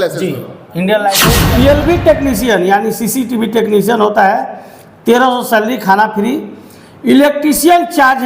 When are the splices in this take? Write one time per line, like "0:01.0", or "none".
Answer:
0:01.3